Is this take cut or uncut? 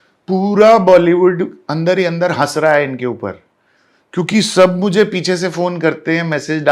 uncut